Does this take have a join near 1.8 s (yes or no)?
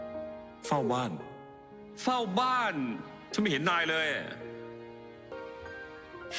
no